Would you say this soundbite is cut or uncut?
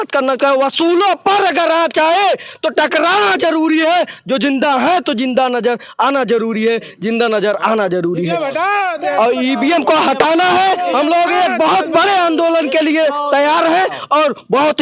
uncut